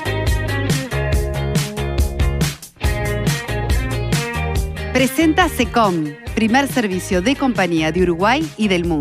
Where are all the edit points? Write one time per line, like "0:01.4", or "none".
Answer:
0:04.9